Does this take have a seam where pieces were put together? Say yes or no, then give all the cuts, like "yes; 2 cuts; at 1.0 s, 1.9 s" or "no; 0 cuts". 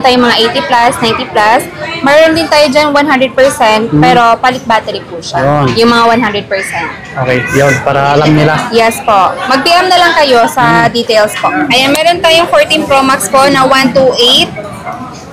yes; 1 cut; at 11.5 s